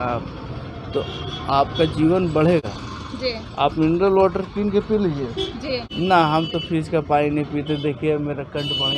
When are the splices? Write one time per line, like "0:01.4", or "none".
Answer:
0:05.9